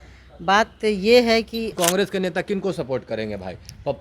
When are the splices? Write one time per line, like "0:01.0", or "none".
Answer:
0:01.7